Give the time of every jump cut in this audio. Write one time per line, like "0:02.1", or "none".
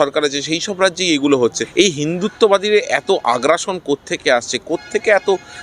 0:01.6